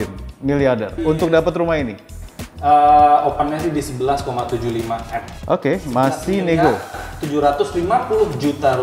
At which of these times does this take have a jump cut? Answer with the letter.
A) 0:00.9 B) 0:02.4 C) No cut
A